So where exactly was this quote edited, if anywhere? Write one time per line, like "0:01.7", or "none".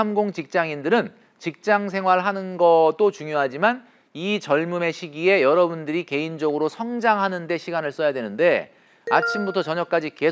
none

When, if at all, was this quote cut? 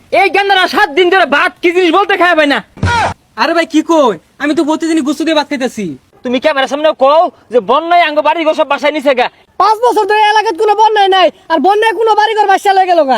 0:02.7
0:06.1
0:09.4

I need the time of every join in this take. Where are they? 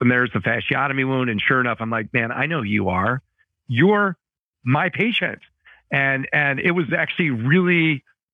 none

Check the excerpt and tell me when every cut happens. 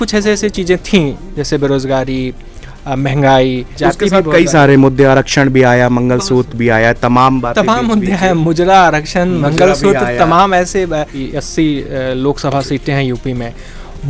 0:03.7
0:11.2

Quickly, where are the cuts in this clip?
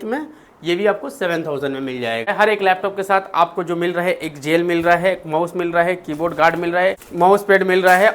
0:02.3
0:07.0

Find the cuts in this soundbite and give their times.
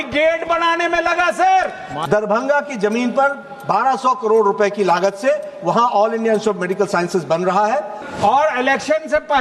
0:01.9
0:08.0

